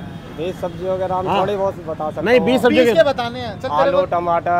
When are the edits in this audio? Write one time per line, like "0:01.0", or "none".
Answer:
none